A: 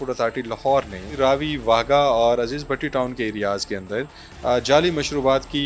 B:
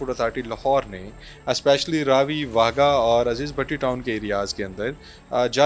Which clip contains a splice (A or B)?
A